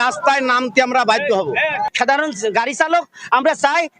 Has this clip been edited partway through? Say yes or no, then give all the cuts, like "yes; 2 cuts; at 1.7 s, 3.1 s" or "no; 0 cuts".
yes; 1 cut; at 1.9 s